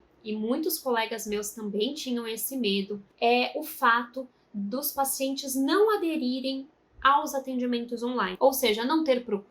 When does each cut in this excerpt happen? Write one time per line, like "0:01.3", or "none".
0:03.0